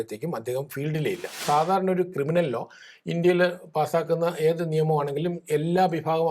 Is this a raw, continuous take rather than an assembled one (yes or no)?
no